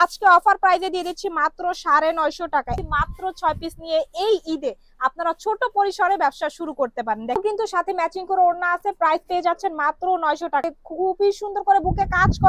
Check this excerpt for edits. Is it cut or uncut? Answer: cut